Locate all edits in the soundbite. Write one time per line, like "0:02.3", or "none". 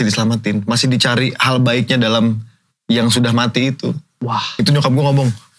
0:04.6

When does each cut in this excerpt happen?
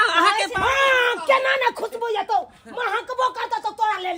none

